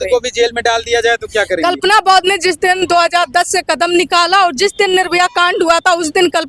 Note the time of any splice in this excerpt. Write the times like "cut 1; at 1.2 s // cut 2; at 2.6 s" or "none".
none